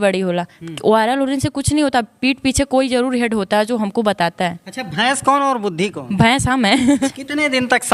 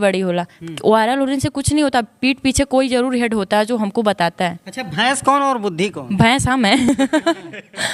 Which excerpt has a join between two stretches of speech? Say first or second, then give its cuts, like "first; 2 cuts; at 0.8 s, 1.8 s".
first; 1 cut; at 6.9 s